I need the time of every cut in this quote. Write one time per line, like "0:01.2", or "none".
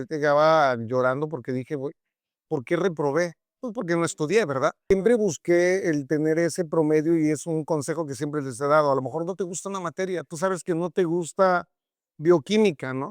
0:04.8